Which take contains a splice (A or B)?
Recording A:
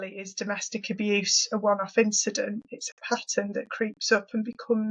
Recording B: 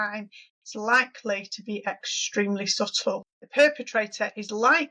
B